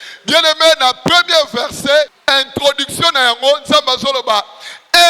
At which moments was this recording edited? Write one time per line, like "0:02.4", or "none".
0:02.1